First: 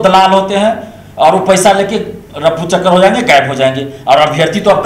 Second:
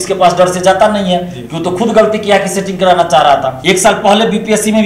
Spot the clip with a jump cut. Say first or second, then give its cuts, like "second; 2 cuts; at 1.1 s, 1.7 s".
second; 1 cut; at 3.5 s